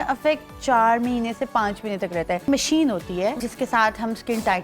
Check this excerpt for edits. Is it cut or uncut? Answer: cut